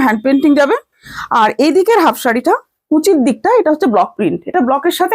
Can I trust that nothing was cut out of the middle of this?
yes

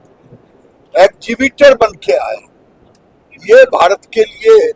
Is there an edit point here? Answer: no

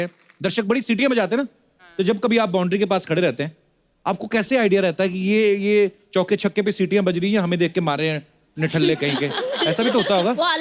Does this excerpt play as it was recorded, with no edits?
yes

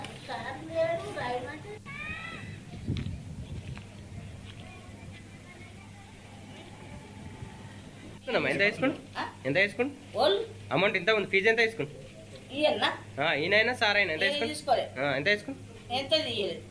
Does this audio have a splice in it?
yes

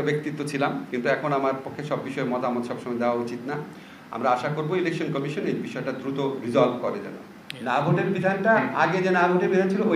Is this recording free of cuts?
yes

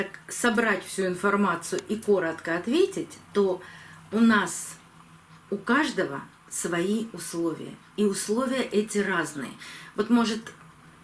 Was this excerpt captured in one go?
yes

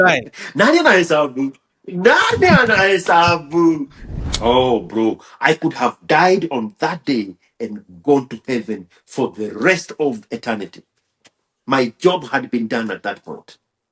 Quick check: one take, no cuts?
no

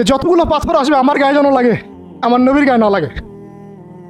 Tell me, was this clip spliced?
no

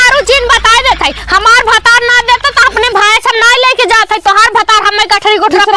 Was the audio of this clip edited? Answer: no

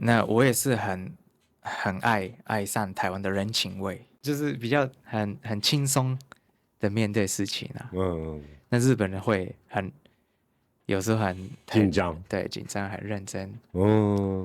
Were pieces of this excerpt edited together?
yes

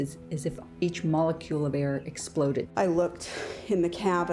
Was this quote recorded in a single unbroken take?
no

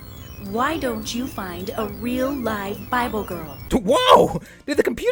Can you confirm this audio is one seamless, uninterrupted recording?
yes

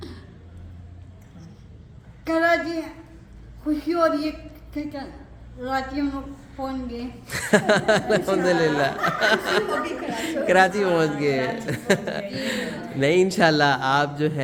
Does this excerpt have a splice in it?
no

